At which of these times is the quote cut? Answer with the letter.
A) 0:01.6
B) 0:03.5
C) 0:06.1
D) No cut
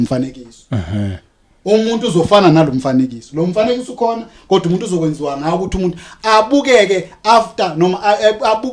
D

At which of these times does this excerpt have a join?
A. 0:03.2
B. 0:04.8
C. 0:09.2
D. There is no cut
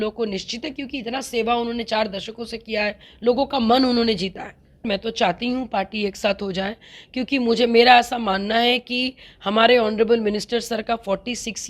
B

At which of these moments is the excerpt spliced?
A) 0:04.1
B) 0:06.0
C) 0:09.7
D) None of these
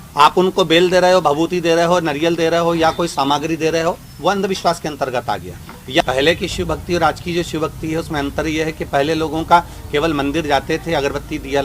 B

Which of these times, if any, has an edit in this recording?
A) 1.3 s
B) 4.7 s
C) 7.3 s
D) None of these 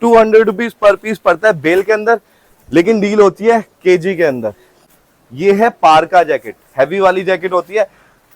B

